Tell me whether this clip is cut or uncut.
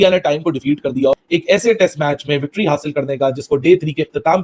uncut